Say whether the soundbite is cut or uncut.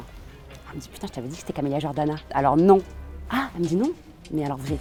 uncut